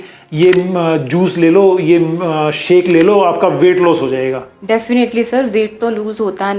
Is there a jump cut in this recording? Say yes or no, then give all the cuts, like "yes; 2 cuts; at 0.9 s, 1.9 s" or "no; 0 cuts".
no; 0 cuts